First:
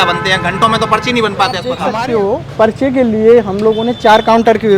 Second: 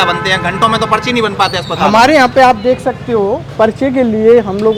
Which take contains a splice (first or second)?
first